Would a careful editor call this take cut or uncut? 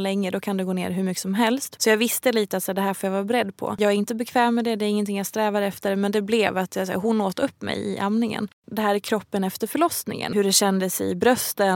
cut